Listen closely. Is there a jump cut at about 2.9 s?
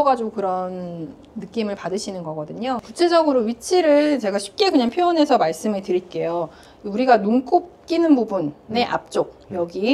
no; 0 cuts

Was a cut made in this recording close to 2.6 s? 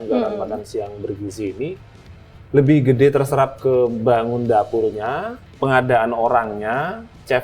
no; 1 cut; at 5.4 s

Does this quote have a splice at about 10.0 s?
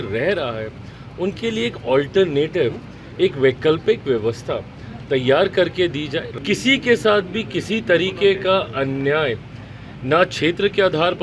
no; 1 cut; at 6.2 s

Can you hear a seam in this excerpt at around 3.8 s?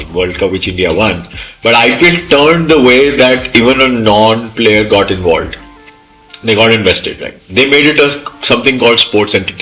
no; 0 cuts

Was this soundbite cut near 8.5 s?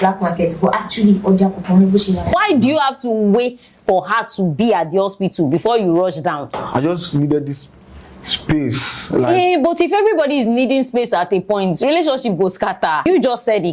no; 3 cuts; at 2.3 s, 6.6 s, 13.1 s

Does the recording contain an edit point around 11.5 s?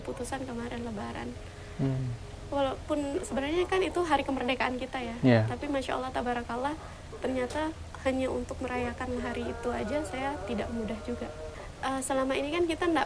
yes; 1 cut; at 11.5 s

